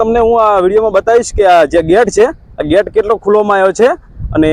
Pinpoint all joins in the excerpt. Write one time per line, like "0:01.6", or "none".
none